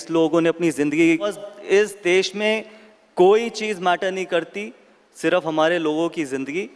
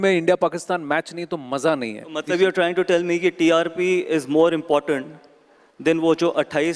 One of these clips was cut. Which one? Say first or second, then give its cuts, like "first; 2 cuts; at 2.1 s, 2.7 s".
first; 1 cut; at 1.4 s